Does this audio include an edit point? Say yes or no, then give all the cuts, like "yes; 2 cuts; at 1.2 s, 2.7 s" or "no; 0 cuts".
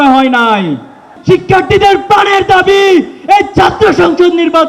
yes; 1 cut; at 1.1 s